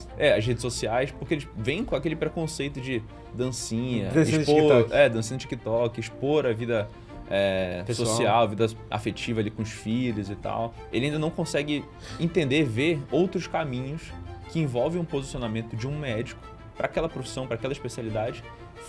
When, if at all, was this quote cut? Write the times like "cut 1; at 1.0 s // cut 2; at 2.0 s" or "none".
cut 1; at 1.5 s // cut 2; at 10.8 s // cut 3; at 12.0 s